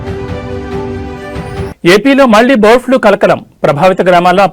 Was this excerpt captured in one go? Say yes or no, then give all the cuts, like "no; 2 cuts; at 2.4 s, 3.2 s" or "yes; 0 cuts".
no; 1 cut; at 1.6 s